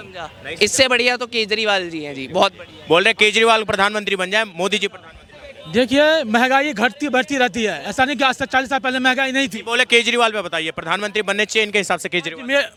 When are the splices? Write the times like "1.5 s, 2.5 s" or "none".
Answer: none